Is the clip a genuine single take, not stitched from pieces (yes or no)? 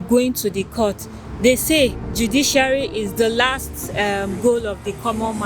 no